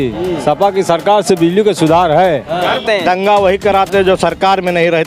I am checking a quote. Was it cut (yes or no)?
yes